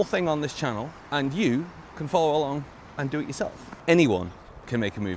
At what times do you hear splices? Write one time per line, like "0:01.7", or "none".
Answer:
0:01.0
0:03.7